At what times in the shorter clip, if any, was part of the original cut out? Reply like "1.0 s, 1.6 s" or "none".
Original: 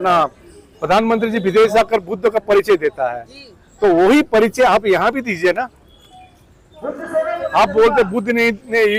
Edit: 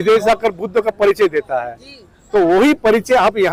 none